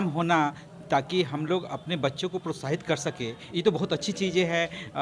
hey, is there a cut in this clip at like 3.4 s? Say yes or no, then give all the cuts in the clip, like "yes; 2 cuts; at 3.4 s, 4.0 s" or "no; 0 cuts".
yes; 1 cut; at 3.4 s